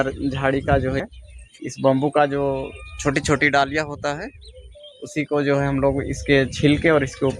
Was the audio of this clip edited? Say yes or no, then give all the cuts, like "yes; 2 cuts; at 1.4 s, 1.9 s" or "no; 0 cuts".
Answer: yes; 1 cut; at 1.0 s